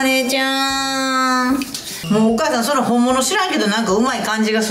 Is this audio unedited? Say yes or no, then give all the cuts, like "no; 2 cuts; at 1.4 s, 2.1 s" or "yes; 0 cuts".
no; 1 cut; at 1.8 s